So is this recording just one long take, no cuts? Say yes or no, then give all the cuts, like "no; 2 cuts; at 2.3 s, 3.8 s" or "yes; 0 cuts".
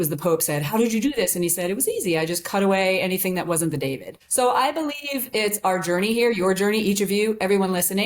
no; 1 cut; at 4.1 s